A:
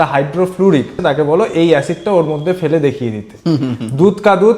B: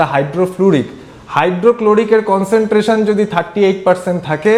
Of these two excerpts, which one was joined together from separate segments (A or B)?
A